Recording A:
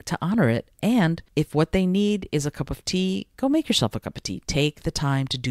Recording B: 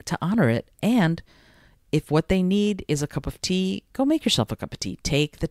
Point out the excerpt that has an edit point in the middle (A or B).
A